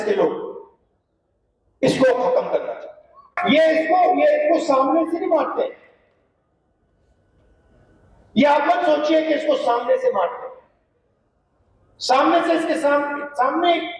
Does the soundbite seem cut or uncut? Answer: cut